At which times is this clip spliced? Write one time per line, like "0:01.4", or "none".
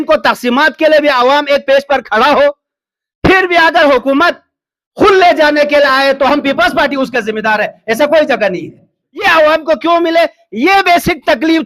0:09.3